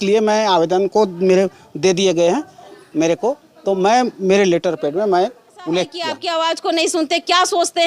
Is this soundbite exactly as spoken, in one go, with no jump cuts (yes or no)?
no